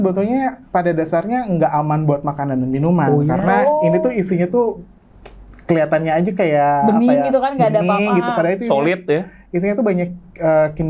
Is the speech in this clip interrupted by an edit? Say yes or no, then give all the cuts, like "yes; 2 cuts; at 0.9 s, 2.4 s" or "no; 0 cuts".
no; 0 cuts